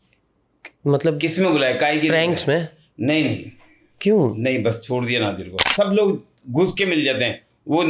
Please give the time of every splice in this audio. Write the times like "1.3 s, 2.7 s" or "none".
5.6 s